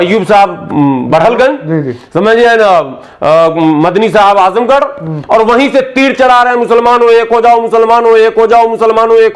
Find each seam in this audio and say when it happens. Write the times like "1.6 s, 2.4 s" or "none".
none